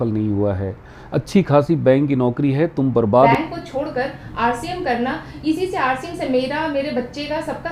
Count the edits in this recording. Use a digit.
1